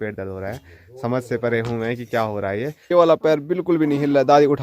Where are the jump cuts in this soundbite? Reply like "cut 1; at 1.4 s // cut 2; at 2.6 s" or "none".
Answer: cut 1; at 2.8 s